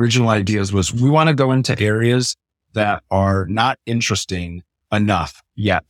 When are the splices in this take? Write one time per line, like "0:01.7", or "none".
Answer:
0:00.9

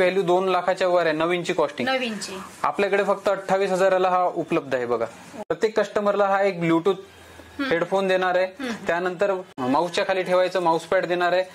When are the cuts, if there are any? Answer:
0:05.5
0:09.5

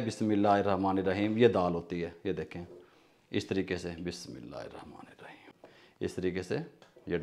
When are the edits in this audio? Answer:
0:05.5

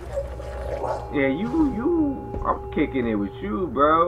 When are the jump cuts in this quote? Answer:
0:01.1

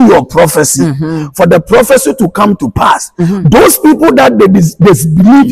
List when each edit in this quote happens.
none

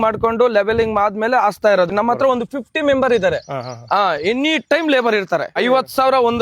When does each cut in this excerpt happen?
0:01.9
0:05.6

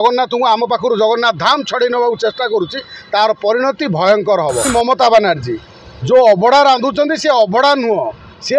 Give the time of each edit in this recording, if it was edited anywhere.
0:04.7

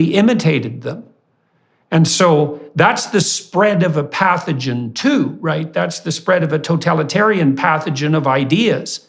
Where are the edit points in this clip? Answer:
none

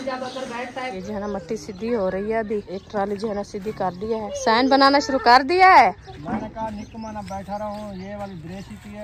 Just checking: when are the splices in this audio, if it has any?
0:00.9
0:02.7
0:04.3
0:06.1

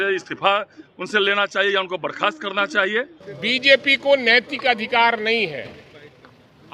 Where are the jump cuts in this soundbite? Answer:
0:03.3

